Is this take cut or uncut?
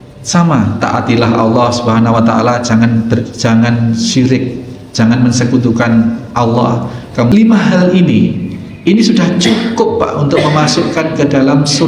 cut